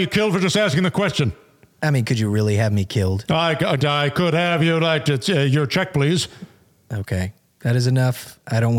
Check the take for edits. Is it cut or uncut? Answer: uncut